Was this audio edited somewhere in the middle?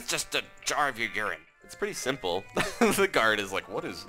yes; 1 cut; at 1.5 s

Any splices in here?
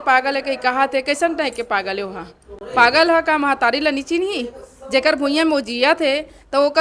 no; 0 cuts

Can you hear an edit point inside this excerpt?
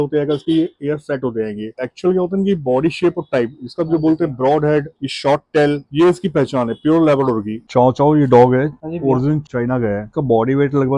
yes; 3 cuts; at 1.7 s, 7.6 s, 10.1 s

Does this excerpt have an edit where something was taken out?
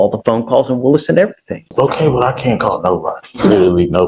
yes; 1 cut; at 1.7 s

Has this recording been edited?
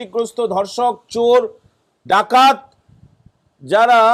no; 0 cuts

